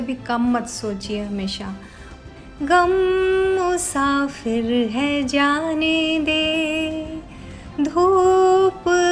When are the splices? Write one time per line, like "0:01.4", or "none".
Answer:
0:02.1